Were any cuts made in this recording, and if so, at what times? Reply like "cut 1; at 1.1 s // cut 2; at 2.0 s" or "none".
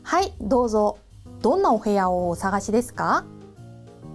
cut 1; at 3.2 s